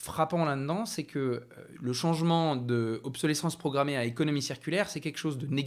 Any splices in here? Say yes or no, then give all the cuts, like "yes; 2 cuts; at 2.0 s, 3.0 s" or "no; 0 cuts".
no; 0 cuts